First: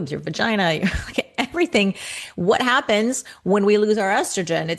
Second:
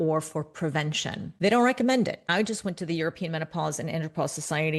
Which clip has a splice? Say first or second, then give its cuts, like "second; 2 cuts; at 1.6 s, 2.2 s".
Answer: second; 2 cuts; at 1.3 s, 2.3 s